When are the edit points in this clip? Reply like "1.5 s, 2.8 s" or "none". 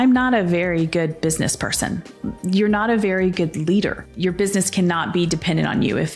4.0 s